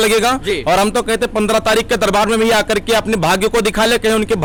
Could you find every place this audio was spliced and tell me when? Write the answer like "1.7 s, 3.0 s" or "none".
none